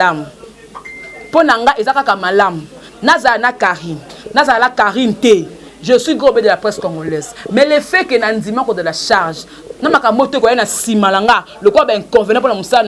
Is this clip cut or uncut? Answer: uncut